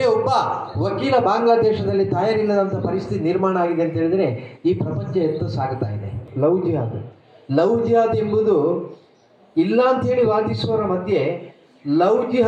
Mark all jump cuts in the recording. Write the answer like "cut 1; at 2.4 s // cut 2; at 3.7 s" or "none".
cut 1; at 6.2 s